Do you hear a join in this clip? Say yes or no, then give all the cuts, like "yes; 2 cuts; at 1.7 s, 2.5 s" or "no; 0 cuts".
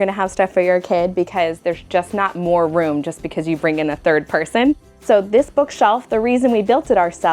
yes; 1 cut; at 4.9 s